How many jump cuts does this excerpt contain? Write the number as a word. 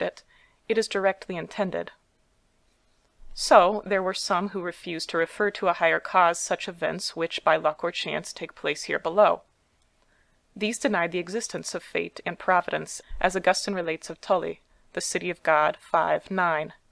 one